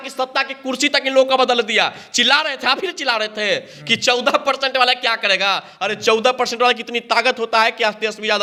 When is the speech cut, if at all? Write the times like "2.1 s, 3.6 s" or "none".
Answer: none

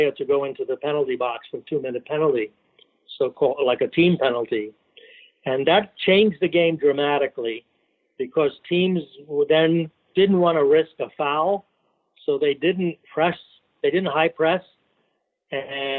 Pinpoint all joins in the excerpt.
10.0 s

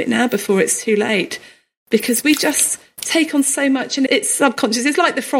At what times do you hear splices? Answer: 4.1 s

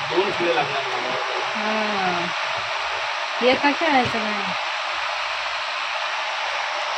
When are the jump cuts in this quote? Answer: none

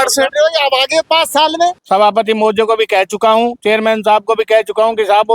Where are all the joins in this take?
1.8 s

